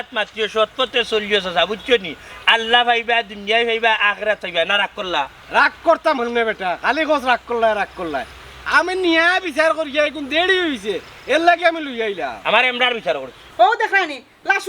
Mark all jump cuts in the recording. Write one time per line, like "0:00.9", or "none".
0:13.4